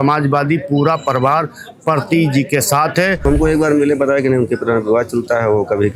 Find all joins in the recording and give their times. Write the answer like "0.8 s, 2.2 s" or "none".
3.2 s